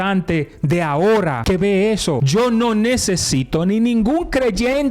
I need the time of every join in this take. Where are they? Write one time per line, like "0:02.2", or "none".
0:01.4
0:02.2